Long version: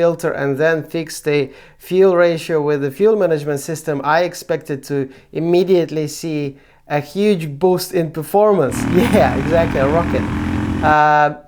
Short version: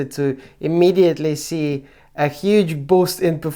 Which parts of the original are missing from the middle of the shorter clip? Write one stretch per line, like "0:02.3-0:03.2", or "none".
none